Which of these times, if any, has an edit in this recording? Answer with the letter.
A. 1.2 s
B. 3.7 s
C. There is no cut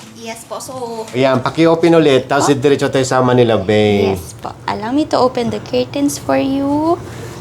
A